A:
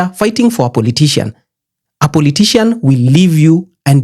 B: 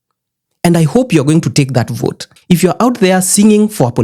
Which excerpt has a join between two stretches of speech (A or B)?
B